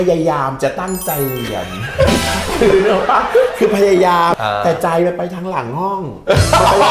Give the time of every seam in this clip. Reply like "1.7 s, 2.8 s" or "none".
4.3 s